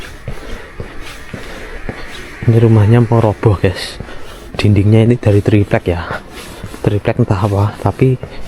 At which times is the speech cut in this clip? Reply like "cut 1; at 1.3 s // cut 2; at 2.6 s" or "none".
none